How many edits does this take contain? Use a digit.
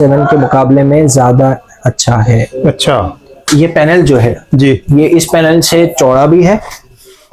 1